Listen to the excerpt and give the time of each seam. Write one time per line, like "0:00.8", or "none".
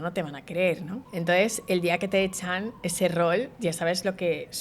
0:01.0